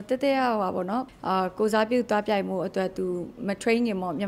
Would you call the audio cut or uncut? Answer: cut